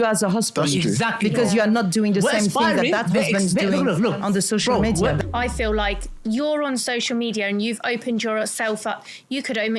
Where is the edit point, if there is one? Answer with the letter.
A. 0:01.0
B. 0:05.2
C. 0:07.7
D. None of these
B